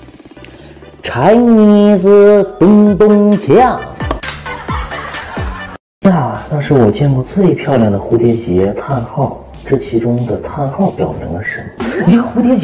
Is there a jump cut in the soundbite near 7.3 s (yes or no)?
no